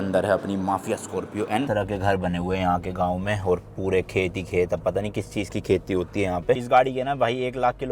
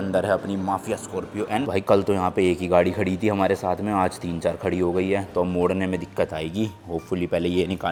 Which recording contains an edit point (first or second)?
first